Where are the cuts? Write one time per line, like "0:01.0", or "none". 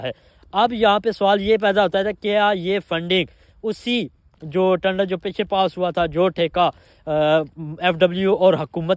none